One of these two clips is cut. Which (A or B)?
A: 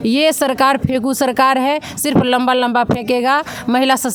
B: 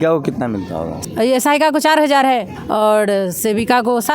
B